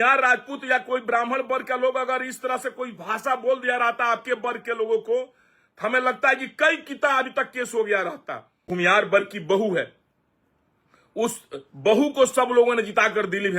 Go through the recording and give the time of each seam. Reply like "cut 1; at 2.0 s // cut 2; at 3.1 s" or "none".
cut 1; at 8.7 s